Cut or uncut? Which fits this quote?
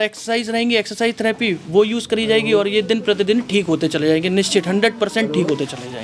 uncut